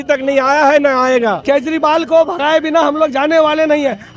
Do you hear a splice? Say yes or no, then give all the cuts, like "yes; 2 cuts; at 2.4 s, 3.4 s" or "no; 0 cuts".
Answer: yes; 1 cut; at 1.4 s